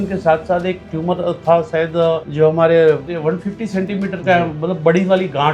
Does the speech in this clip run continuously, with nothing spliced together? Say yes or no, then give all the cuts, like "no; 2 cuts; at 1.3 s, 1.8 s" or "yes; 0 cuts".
no; 2 cuts; at 2.3 s, 3.1 s